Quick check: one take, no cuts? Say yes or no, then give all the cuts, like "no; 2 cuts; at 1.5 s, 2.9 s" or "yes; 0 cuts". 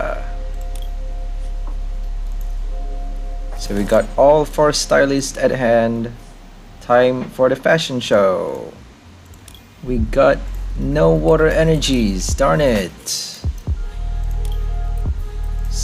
yes; 0 cuts